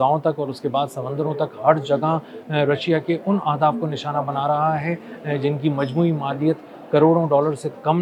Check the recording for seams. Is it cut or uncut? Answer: uncut